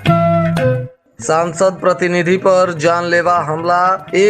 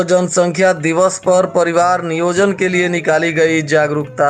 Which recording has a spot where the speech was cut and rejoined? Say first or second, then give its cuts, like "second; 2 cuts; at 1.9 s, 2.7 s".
first; 1 cut; at 0.9 s